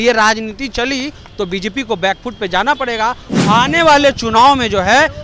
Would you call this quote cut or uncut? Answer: cut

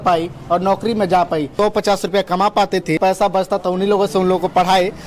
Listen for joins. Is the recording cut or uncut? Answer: cut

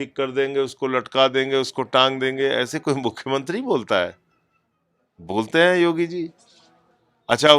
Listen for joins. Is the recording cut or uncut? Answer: uncut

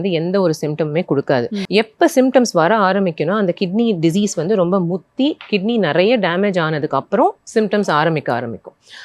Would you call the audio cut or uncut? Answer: cut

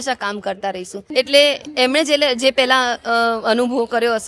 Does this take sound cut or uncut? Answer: cut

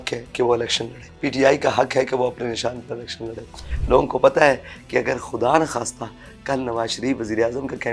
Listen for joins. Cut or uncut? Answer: cut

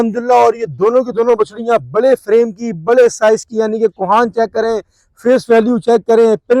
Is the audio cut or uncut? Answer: uncut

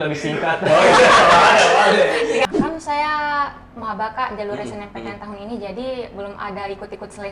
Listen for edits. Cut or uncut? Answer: cut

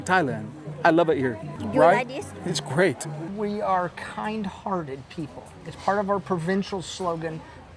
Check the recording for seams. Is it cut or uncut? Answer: cut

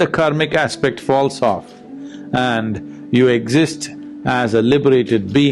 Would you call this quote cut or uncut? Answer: uncut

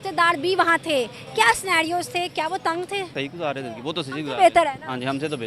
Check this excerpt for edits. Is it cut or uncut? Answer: cut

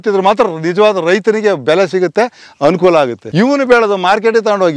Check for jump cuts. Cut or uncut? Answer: cut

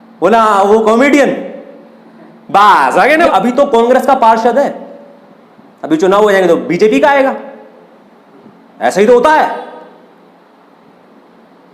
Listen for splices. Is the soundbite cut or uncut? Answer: cut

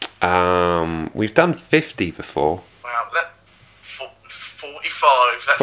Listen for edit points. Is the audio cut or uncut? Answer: cut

